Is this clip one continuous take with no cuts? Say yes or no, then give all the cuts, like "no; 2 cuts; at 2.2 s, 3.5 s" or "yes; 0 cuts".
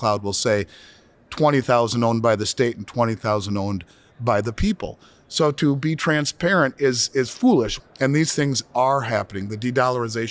no; 1 cut; at 7.8 s